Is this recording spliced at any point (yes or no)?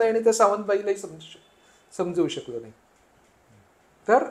no